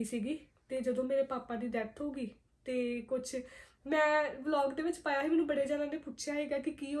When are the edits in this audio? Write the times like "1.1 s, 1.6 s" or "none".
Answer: none